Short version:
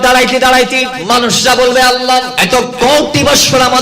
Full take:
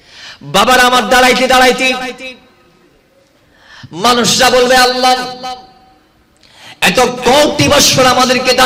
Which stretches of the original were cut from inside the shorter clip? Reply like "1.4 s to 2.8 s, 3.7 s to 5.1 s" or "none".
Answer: 2.0 s to 3.9 s, 5.3 s to 6.8 s